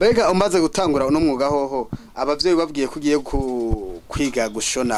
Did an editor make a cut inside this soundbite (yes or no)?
no